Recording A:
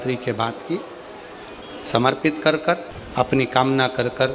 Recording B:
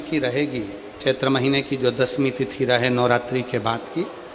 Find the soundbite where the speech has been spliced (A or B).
A